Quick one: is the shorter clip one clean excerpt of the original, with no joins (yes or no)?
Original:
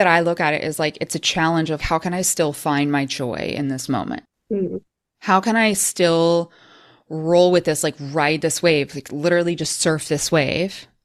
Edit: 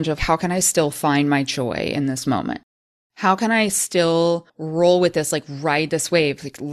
no